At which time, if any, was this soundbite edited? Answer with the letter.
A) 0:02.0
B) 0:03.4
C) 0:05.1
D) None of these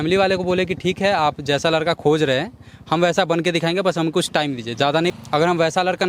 C